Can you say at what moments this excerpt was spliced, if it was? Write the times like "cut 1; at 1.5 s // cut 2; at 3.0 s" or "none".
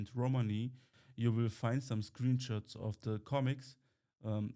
cut 1; at 0.9 s